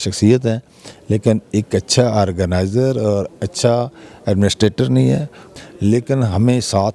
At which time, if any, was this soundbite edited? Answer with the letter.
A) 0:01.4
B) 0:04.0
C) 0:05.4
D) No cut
C